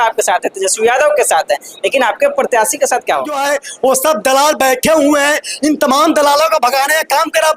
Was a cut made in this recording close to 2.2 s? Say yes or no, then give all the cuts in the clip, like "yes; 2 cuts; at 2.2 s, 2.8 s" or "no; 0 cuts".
no; 1 cut; at 3.4 s